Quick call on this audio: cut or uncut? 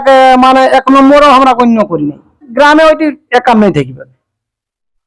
cut